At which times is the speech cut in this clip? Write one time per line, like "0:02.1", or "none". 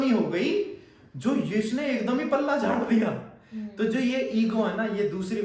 none